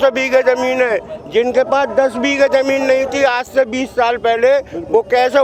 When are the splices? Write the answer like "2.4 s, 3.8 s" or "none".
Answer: none